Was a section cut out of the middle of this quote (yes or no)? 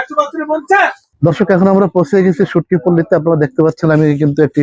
yes